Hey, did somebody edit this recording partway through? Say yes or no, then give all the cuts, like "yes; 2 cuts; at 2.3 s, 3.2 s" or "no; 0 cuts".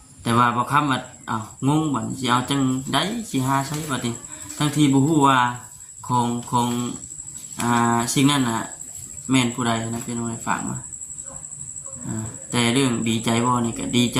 no; 0 cuts